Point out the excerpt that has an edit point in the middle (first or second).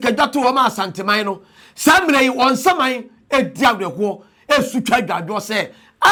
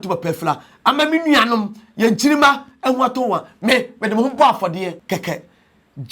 second